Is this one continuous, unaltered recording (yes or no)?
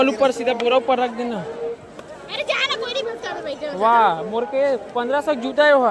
yes